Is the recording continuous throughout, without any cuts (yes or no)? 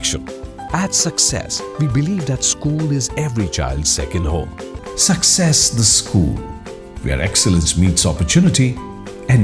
no